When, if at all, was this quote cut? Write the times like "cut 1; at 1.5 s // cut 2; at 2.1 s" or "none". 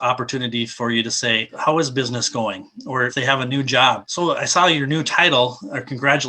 cut 1; at 1.5 s // cut 2; at 3.1 s // cut 3; at 4.1 s